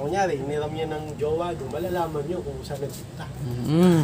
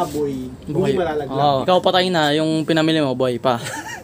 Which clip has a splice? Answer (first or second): second